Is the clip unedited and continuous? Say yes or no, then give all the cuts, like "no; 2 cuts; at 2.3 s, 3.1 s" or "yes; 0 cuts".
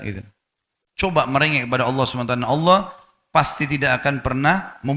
yes; 0 cuts